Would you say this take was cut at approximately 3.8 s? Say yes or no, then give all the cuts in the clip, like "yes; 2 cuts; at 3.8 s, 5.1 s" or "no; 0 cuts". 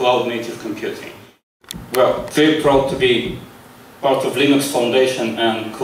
no; 1 cut; at 1.5 s